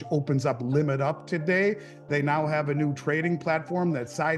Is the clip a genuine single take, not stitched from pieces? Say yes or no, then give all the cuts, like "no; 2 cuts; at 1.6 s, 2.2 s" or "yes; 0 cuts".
yes; 0 cuts